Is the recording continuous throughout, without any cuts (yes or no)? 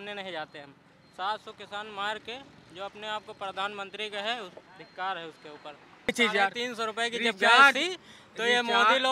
no